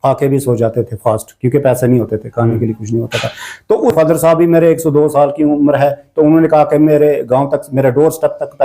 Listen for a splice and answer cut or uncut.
cut